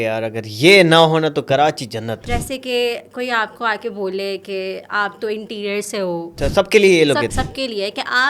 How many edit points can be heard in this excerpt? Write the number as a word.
three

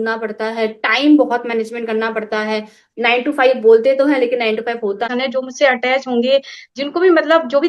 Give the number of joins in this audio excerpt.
one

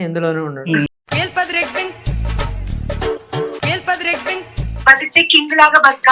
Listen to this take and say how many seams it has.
two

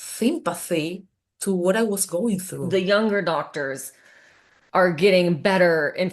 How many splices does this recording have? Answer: one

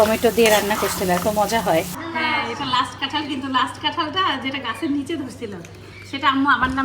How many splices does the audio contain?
one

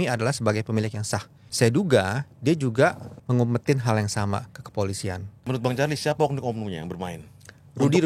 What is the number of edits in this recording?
three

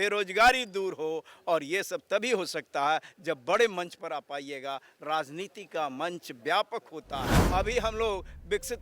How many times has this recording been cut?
one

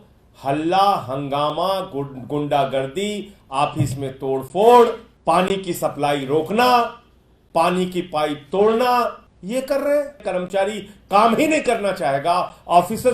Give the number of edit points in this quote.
three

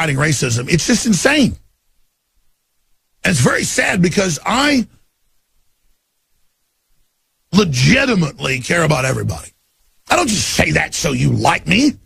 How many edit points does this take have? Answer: zero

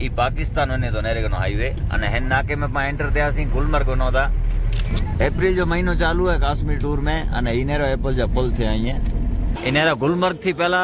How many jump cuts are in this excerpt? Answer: two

